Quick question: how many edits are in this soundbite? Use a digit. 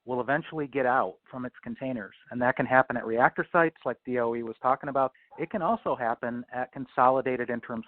1